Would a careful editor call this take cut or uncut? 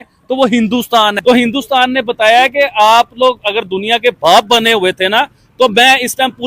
cut